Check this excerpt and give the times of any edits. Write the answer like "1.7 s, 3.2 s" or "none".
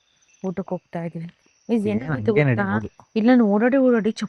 none